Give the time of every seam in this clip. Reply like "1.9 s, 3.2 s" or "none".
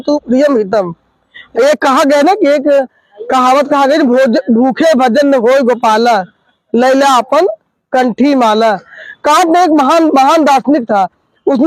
1.4 s, 9.0 s